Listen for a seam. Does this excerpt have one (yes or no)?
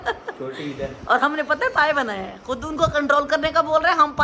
no